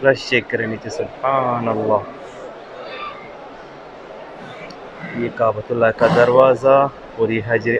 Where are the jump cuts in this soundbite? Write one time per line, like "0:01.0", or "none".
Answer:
none